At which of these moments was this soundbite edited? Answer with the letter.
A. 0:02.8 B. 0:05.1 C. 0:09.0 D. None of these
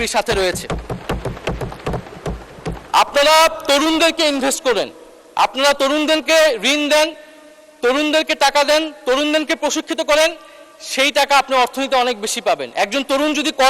A